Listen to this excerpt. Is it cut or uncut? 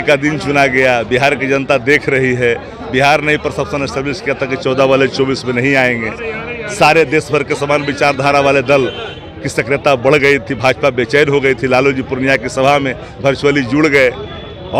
uncut